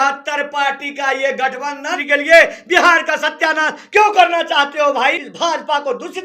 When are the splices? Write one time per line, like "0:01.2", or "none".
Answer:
0:02.0
0:05.2